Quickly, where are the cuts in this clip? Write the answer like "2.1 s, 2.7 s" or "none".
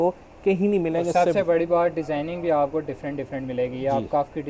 none